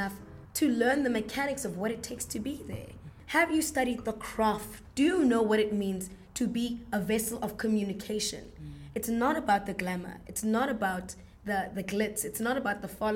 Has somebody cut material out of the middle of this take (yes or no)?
yes